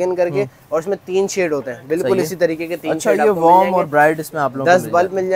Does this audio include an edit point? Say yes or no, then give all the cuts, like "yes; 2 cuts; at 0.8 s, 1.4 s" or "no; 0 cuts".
no; 0 cuts